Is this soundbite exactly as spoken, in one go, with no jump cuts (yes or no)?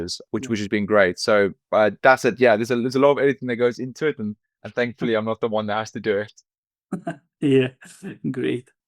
yes